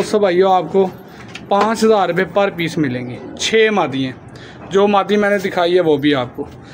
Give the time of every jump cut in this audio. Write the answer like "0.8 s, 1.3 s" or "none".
none